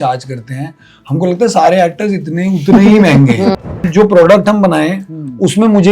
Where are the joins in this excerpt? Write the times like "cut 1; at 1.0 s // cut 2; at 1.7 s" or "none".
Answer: cut 1; at 3.9 s